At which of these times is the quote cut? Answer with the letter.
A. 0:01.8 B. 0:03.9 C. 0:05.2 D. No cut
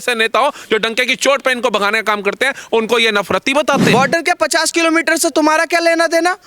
B